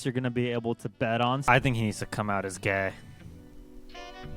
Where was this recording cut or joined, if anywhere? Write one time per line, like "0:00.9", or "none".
0:01.4